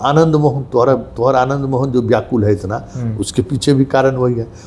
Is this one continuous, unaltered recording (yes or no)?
yes